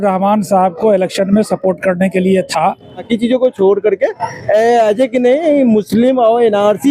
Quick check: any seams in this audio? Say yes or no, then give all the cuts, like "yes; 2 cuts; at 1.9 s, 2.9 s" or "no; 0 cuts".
yes; 1 cut; at 3.0 s